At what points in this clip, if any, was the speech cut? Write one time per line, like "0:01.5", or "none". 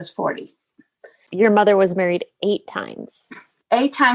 0:01.2

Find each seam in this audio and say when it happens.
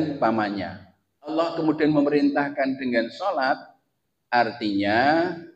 0:01.4

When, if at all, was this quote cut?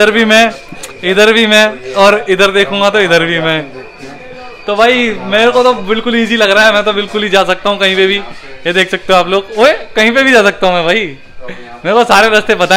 none

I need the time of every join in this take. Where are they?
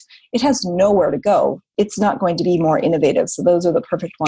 0:01.7

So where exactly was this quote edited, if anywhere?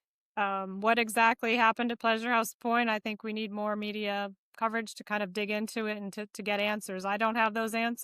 none

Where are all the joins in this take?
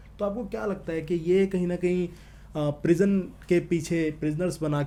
none

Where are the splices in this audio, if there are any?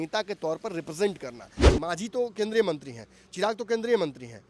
0:01.6

